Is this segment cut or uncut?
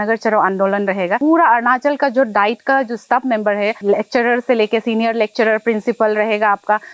cut